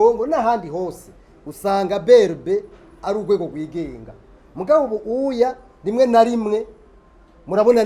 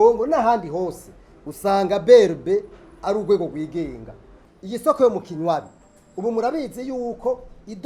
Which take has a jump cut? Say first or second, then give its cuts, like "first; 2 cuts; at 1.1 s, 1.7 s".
second; 1 cut; at 4.5 s